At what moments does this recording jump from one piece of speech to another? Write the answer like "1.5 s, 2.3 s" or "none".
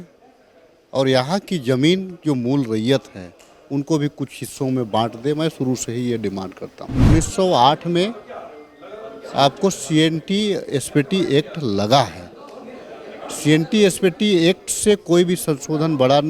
7.0 s